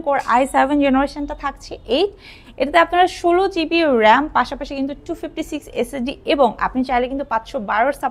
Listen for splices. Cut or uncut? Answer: uncut